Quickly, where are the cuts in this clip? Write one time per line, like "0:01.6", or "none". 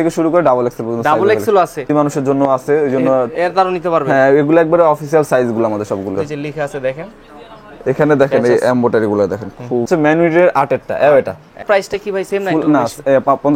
0:01.9
0:06.1
0:09.8
0:11.6